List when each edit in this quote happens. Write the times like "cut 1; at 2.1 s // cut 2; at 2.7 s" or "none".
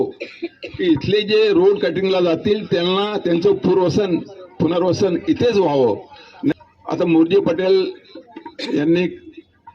cut 1; at 6.5 s